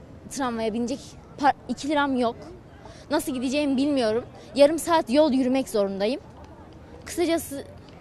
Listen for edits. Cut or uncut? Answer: uncut